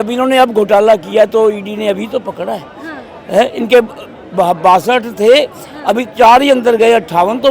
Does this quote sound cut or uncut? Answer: uncut